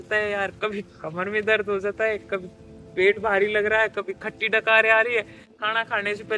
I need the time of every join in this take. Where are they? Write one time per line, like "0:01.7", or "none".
none